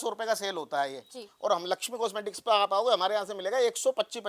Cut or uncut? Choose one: uncut